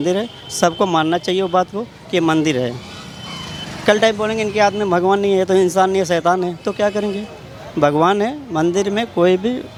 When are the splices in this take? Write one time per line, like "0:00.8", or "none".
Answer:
none